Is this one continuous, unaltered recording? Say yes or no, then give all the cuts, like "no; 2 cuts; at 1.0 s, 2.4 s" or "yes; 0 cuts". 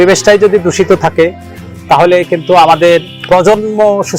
yes; 0 cuts